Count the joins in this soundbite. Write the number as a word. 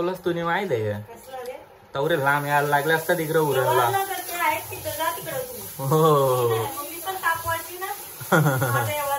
zero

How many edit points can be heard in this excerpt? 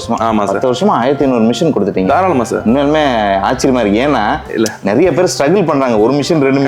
zero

